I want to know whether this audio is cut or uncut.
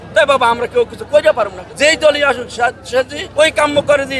cut